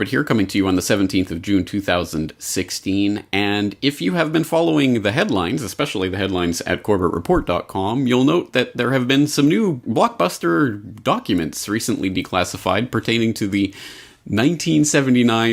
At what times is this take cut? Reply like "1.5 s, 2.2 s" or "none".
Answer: none